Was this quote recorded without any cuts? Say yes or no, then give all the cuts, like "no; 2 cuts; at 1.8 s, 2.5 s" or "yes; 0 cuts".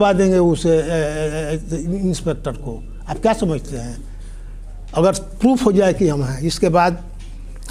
yes; 0 cuts